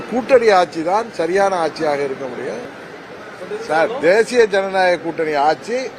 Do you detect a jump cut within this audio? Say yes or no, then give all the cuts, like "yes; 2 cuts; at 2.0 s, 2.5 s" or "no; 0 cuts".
yes; 1 cut; at 2.7 s